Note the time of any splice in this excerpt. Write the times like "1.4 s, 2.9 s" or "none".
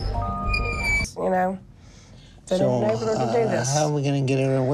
1.0 s